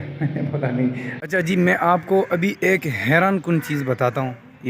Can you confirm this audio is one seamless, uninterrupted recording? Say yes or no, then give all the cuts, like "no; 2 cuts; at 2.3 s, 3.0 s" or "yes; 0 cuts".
no; 1 cut; at 1.1 s